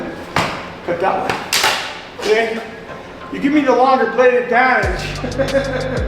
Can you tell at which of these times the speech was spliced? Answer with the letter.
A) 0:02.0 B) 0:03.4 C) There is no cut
A